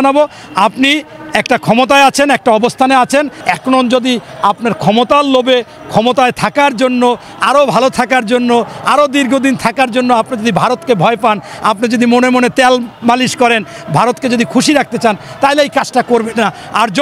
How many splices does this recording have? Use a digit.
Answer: 1